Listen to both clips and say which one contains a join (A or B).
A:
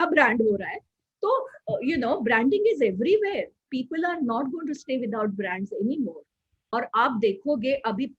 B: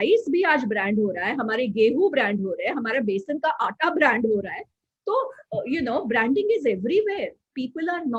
A